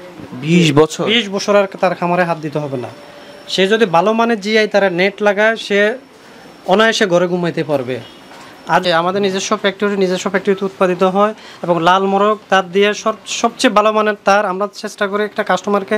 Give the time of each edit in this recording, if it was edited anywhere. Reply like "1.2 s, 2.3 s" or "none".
8.8 s